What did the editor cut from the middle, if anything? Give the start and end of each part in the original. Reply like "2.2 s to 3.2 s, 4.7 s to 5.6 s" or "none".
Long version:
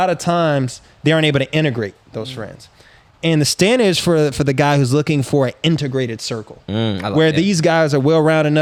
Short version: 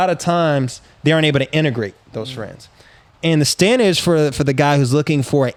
none